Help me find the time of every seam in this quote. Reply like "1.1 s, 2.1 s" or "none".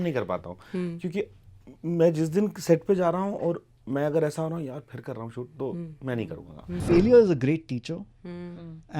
6.7 s